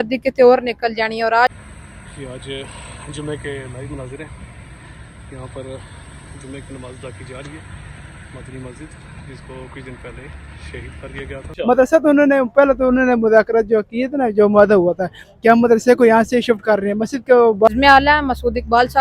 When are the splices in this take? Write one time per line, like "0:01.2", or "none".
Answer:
0:01.5
0:11.4
0:17.7